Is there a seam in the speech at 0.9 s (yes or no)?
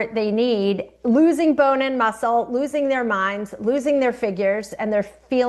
no